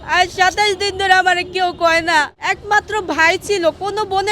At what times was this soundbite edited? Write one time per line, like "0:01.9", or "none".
0:02.4